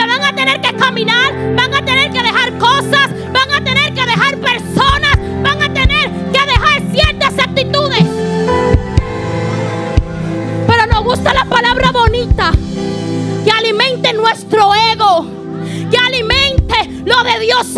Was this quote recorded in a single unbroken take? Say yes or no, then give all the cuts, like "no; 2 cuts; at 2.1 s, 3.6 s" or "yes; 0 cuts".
yes; 0 cuts